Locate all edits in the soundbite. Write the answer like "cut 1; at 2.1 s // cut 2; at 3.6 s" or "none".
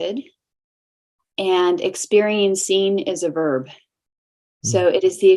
none